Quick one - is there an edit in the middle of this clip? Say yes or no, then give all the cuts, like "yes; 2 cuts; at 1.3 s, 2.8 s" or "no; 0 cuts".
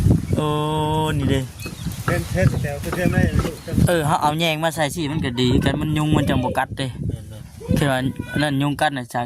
yes; 1 cut; at 3.7 s